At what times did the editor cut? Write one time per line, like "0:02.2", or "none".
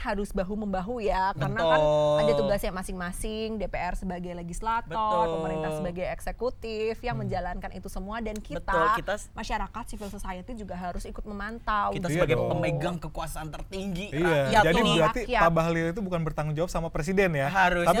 none

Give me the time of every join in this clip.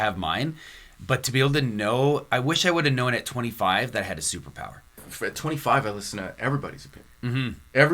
0:05.1

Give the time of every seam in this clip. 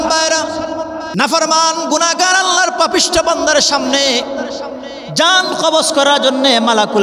0:01.0

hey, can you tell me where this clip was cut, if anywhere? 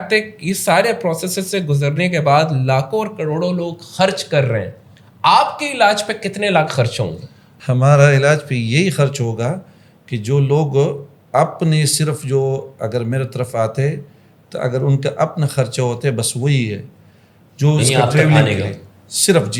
none

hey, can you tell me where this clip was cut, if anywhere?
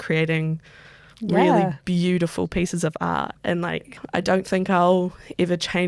0:04.0

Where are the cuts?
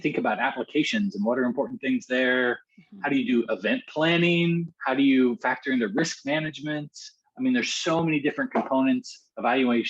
none

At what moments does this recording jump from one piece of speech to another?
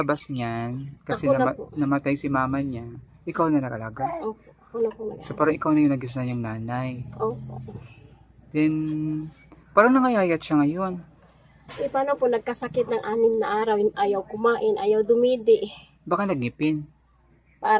none

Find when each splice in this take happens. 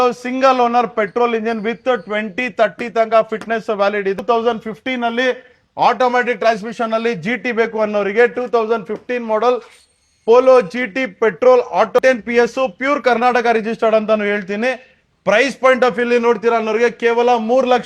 0:04.2
0:12.0

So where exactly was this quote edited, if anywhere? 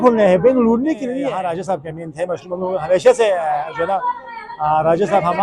0:01.2

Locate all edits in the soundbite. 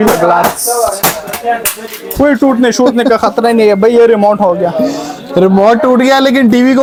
none

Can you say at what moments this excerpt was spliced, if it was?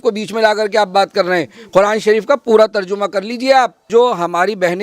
0:03.9

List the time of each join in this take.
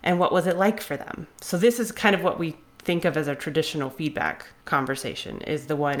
0:04.5

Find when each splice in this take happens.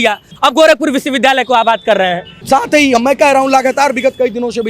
0:02.3

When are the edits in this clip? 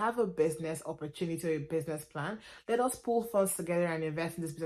none

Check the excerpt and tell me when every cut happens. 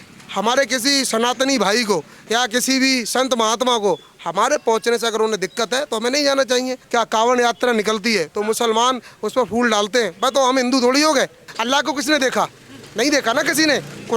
0:06.8
0:11.5

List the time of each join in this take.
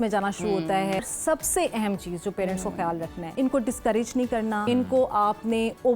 0:01.0
0:03.2
0:04.6

